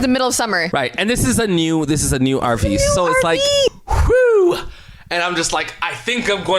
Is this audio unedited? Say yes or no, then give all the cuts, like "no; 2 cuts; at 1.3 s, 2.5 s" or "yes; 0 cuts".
no; 1 cut; at 3.7 s